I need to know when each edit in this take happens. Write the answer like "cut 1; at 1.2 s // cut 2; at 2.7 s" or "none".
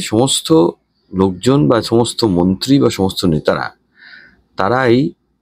none